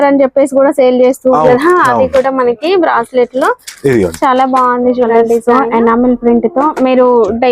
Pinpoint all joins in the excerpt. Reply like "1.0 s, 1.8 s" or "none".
1.4 s, 5.4 s